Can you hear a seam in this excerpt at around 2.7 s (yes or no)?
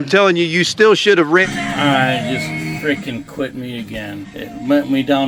no